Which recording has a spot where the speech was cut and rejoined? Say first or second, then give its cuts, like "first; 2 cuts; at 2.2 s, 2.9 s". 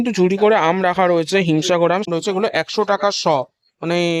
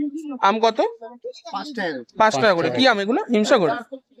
first; 1 cut; at 2.1 s